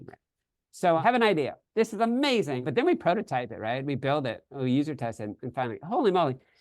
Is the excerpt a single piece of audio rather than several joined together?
no; 2 cuts; at 1.0 s, 2.7 s

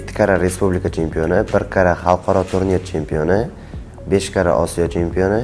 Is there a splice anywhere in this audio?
no; 0 cuts

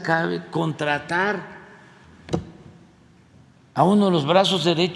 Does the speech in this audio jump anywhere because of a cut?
no; 0 cuts

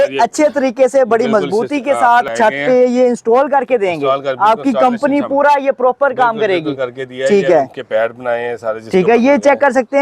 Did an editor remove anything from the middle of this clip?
yes; 1 cut; at 2.3 s

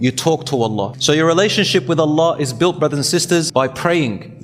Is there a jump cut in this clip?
yes; 2 cuts; at 0.9 s, 3.5 s

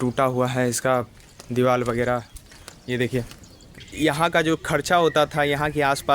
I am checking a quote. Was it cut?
yes; 1 cut; at 3.8 s

